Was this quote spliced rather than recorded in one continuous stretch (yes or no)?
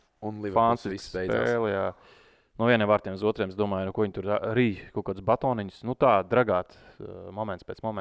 no